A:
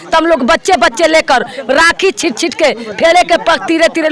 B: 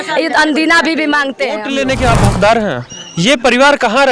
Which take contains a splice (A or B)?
B